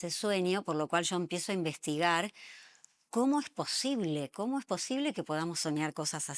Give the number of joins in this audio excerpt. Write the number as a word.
zero